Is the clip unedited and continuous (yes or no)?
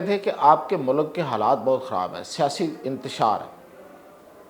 yes